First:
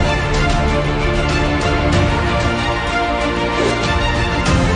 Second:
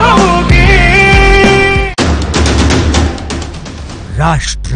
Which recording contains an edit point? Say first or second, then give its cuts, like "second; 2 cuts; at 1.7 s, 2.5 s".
second; 1 cut; at 1.9 s